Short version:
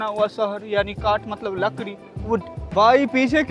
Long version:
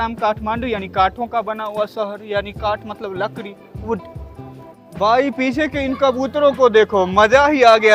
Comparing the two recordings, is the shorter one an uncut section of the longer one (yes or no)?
no